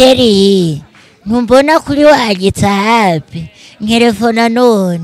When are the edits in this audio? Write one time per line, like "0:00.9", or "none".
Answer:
none